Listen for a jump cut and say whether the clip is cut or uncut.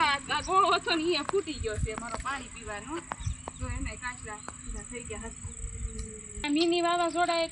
cut